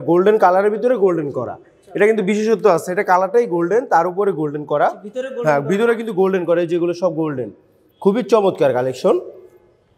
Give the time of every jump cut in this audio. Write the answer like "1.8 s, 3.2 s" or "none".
none